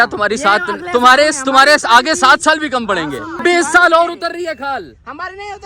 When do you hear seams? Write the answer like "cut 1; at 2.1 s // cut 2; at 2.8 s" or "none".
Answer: cut 1; at 3.4 s